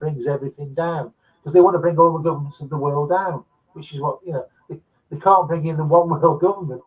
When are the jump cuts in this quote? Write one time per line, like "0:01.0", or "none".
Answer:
none

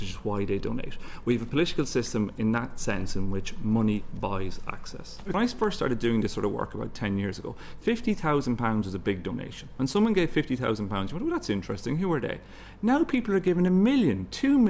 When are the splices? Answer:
0:05.3

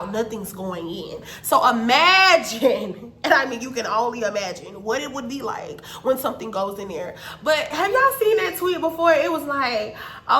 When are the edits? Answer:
0:07.7

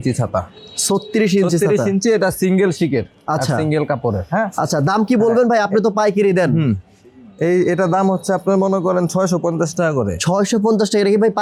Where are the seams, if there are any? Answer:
none

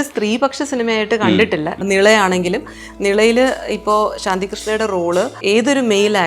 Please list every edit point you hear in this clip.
0:01.8
0:05.3

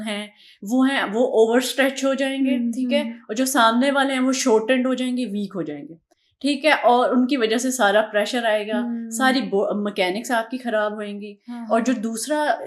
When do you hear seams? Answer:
none

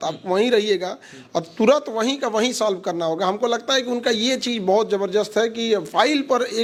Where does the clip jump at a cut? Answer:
none

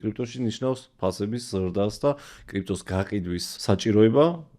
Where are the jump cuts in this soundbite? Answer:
0:03.5

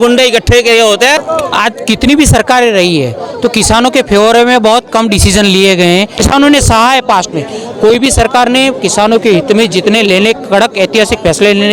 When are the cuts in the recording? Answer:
0:01.2
0:06.1

